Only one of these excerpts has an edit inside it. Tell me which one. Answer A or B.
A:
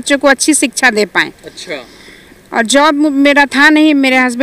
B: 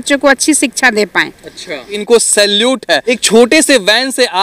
B